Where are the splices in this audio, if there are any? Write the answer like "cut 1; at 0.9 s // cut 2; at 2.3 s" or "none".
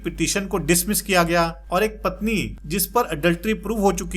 cut 1; at 1.6 s // cut 2; at 2.6 s